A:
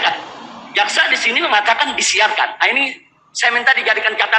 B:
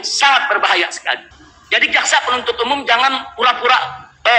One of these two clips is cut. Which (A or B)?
B